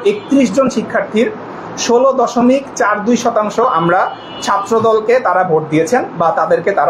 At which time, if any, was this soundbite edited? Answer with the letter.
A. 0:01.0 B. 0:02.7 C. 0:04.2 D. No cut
D